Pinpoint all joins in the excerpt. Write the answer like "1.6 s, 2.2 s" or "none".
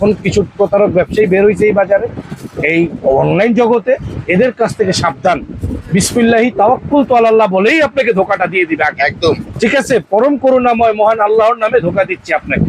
none

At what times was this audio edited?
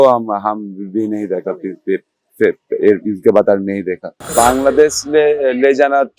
4.3 s

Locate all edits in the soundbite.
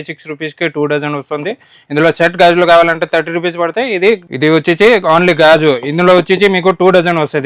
none

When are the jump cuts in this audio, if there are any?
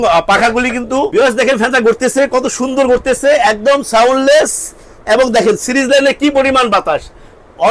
1.1 s

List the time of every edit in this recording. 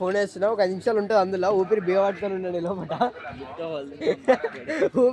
none

